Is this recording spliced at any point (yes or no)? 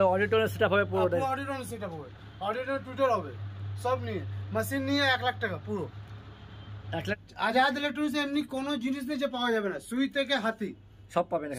yes